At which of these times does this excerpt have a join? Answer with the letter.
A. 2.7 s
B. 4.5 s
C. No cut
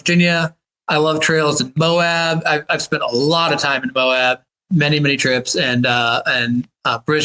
B